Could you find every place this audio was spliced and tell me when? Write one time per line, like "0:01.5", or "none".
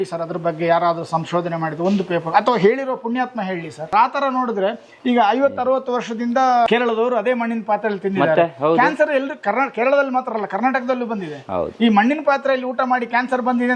0:03.8
0:06.7